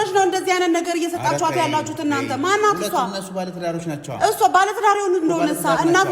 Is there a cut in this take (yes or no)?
no